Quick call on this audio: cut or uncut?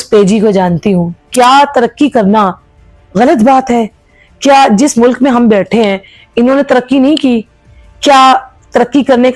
cut